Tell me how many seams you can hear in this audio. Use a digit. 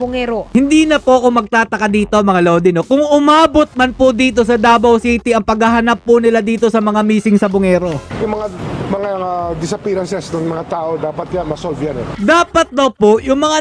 2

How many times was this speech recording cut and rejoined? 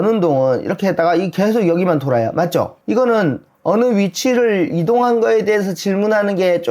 1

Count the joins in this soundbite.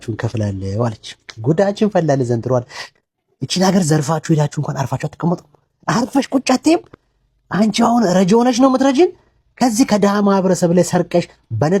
0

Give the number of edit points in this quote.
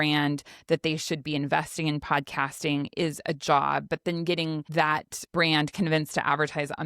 1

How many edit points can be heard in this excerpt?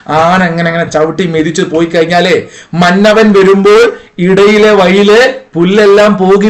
0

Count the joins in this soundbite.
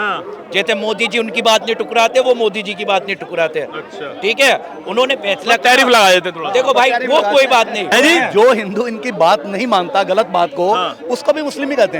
1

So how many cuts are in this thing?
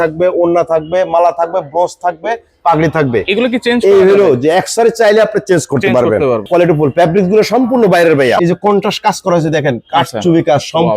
2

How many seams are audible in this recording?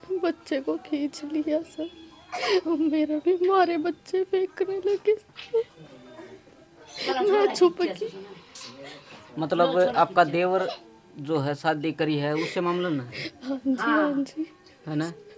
0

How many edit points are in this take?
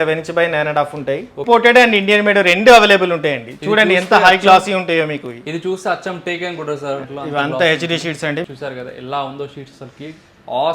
3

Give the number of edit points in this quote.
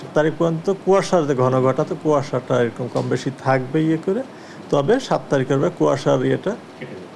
0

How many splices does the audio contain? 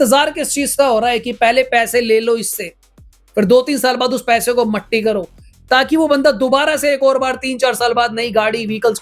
0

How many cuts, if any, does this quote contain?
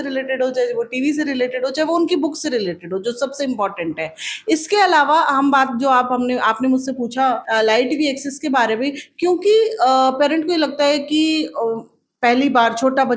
0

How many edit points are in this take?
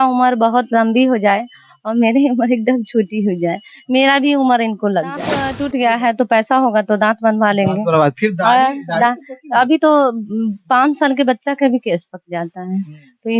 1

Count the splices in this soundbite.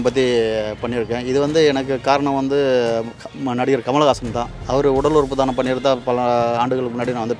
0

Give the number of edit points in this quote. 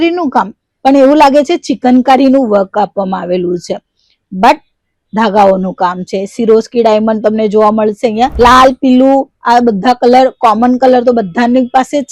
1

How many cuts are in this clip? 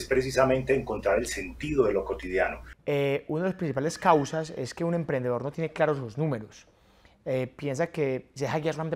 1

